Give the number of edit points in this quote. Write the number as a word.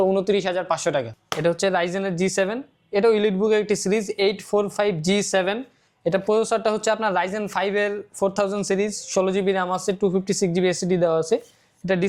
one